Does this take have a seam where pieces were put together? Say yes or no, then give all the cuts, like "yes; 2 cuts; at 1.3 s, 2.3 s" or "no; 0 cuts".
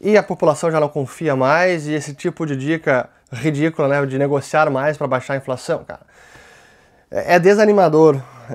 no; 0 cuts